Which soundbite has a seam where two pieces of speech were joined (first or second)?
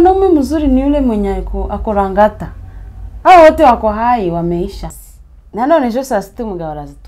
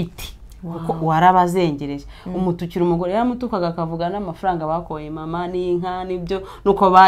first